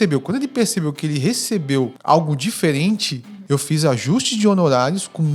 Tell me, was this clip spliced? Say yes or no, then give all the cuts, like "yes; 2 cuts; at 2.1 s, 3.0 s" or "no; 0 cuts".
yes; 2 cuts; at 2.0 s, 3.1 s